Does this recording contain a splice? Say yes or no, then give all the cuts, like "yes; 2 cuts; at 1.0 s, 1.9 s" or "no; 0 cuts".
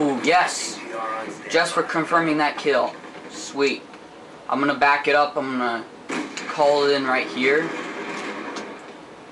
no; 0 cuts